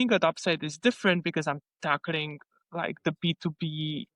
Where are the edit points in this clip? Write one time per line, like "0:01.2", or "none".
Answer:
none